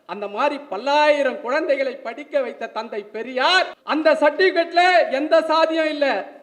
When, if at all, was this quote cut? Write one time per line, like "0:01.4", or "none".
0:03.8